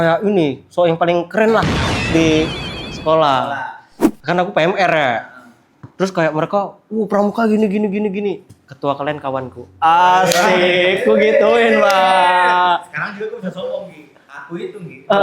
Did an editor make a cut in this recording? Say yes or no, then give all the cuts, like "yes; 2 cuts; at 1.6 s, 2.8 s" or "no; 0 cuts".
no; 0 cuts